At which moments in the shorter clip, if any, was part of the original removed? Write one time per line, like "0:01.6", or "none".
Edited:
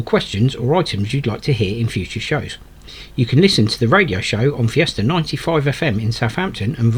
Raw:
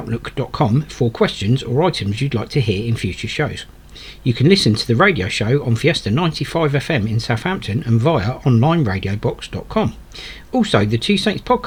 none